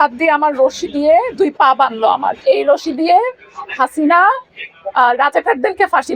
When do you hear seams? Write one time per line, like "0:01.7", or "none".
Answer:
0:02.4